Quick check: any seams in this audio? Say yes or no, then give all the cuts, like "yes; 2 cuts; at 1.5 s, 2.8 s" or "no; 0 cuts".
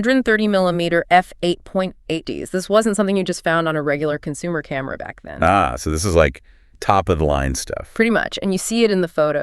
yes; 1 cut; at 2.3 s